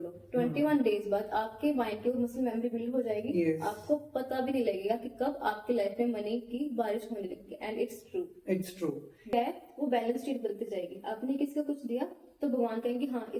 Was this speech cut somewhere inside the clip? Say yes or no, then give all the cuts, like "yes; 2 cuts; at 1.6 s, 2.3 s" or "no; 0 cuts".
yes; 1 cut; at 9.3 s